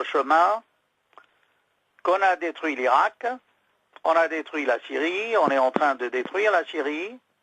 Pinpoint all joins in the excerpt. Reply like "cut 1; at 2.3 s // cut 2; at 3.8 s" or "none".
cut 1; at 2.4 s